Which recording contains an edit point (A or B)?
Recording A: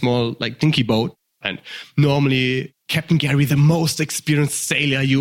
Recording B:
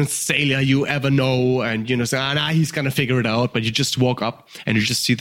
A